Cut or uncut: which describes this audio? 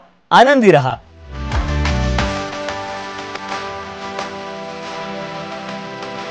cut